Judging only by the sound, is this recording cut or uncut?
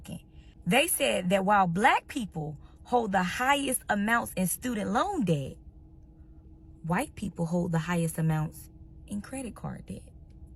uncut